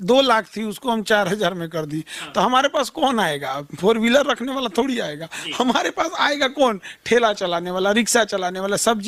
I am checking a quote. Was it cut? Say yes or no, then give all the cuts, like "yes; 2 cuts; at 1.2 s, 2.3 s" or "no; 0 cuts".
no; 0 cuts